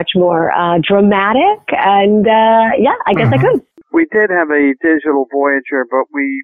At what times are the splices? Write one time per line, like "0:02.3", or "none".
0:03.8